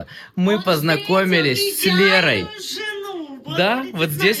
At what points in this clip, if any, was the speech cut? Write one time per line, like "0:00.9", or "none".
none